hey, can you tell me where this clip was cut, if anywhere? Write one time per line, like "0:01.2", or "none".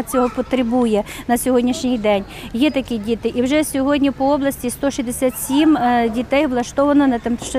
none